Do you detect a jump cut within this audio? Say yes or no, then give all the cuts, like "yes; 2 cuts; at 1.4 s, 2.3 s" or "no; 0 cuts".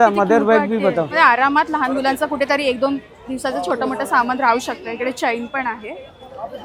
no; 0 cuts